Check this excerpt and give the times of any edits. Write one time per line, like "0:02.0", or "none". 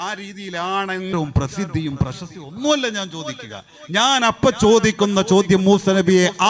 0:01.1